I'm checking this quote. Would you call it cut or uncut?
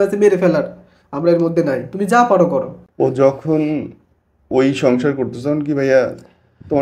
cut